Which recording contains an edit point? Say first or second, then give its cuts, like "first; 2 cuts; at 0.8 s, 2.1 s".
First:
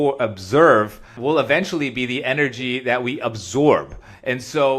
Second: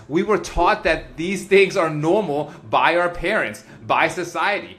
first; 1 cut; at 1.1 s